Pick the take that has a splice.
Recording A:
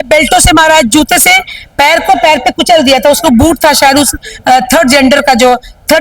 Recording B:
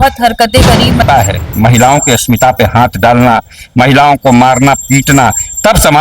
B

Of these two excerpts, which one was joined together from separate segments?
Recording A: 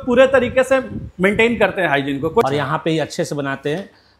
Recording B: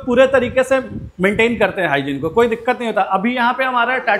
A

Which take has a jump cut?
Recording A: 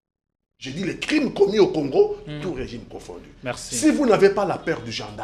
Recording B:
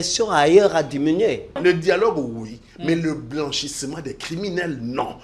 B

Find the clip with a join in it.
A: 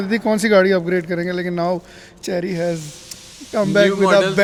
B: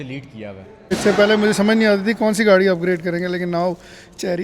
B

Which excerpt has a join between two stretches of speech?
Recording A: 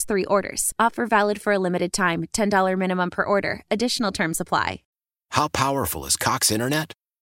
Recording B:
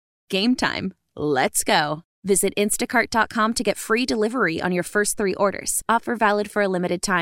A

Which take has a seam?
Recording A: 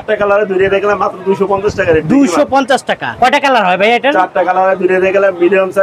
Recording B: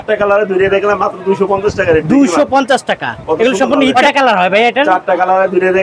A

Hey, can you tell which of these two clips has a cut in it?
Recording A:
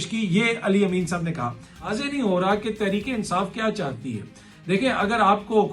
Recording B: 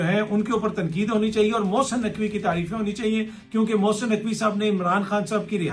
A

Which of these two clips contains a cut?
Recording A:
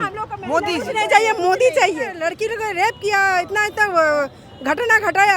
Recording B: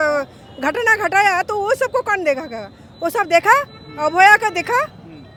A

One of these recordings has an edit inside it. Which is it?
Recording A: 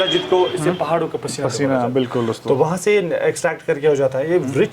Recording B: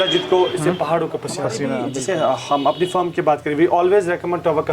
B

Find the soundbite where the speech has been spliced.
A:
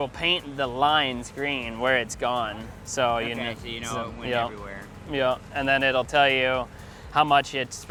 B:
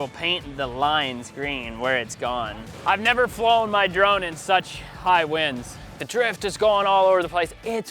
B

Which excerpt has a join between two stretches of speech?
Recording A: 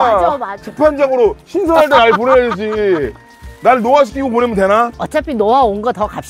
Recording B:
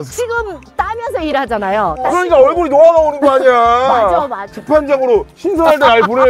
B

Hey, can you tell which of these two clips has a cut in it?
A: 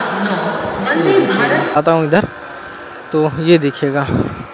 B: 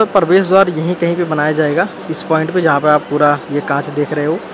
A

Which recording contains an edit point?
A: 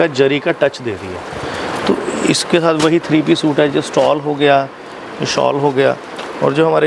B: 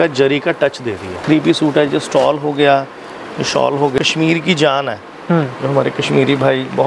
B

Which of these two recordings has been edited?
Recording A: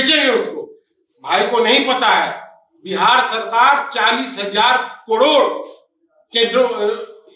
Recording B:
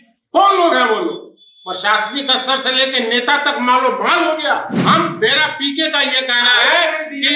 B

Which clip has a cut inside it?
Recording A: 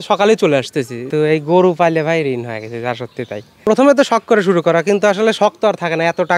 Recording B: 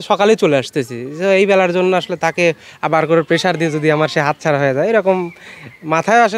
A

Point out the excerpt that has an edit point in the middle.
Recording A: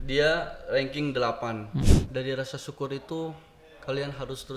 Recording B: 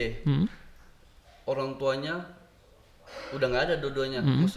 A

